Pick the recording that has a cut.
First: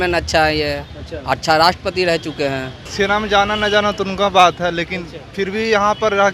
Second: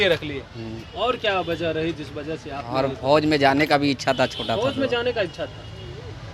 first; 1 cut; at 2.8 s

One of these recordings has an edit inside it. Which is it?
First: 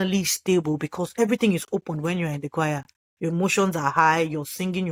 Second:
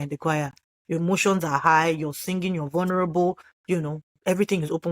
second; 1 cut; at 3.7 s

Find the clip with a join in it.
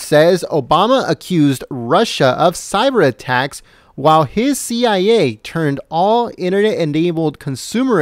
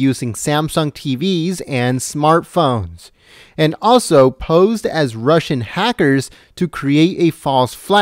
second; 1 cut; at 6.2 s

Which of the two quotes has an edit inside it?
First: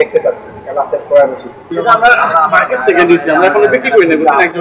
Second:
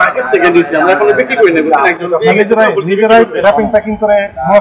first; 1 cut; at 1.6 s

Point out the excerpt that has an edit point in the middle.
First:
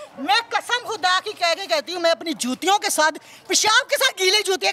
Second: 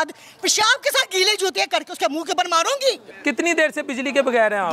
second; 1 cut; at 3.1 s

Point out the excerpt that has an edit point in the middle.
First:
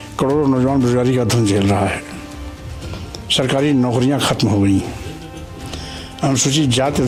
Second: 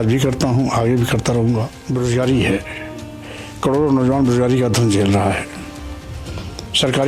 second; 1 cut; at 1.8 s

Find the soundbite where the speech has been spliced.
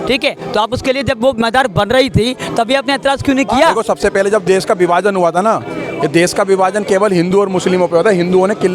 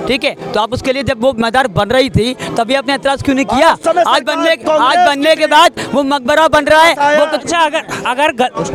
first; 1 cut; at 3.8 s

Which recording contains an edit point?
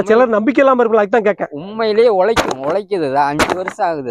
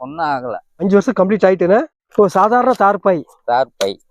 second; 2 cuts; at 0.8 s, 2.0 s

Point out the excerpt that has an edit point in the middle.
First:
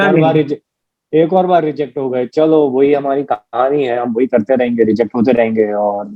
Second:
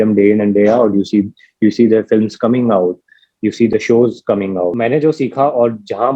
second; 1 cut; at 4.8 s

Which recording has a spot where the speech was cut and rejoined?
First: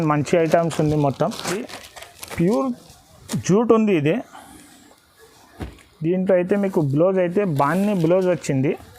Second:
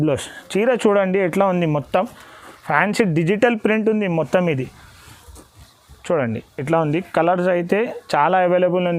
first; 1 cut; at 1.6 s

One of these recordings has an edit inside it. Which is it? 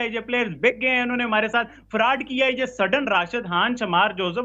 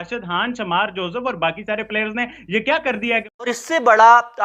second; 1 cut; at 3.3 s

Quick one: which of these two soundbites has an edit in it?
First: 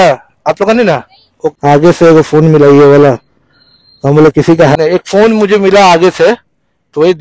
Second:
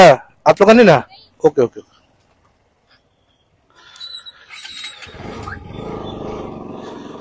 first; 2 cuts; at 1.6 s, 4.8 s

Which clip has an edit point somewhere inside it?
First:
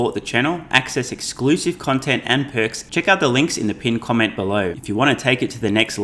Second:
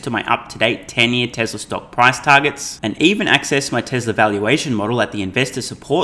first; 2 cuts; at 2.8 s, 4.8 s

